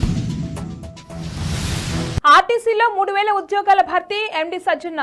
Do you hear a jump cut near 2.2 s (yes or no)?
yes